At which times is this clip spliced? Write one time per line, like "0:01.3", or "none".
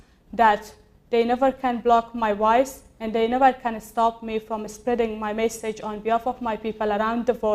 none